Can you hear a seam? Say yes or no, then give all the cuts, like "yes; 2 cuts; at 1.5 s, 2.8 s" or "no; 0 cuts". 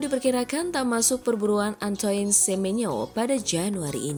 no; 0 cuts